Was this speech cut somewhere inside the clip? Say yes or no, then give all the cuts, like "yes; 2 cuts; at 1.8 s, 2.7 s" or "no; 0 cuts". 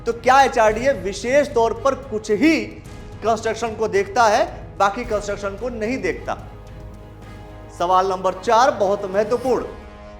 no; 0 cuts